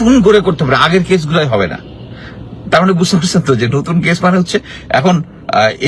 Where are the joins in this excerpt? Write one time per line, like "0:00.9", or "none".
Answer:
none